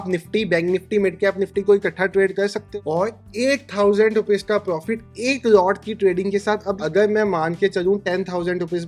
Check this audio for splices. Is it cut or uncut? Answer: cut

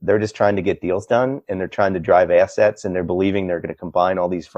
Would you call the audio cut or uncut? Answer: uncut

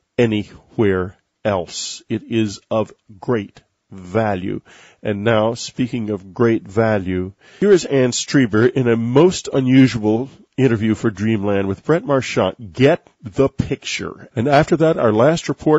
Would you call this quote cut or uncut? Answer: uncut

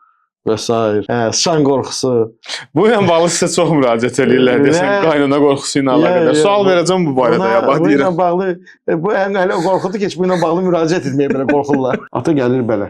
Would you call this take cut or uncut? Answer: cut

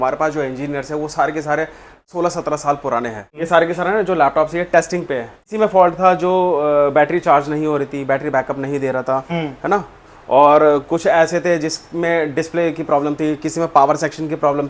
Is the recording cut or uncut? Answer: cut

